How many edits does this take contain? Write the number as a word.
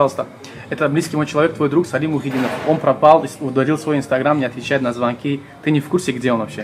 zero